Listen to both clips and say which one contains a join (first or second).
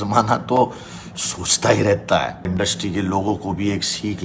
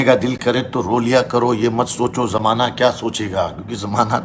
first